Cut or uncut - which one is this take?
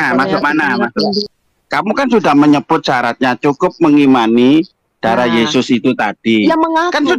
cut